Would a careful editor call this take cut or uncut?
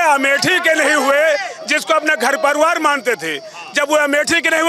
uncut